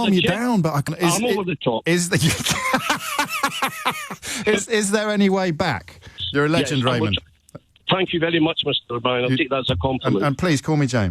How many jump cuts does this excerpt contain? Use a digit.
2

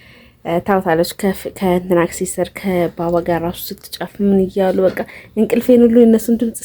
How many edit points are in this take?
0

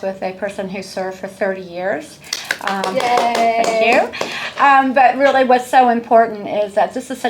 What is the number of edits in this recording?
0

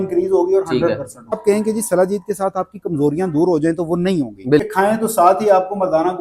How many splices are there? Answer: 2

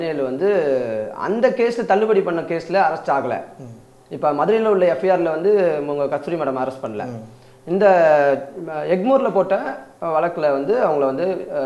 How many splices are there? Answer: 0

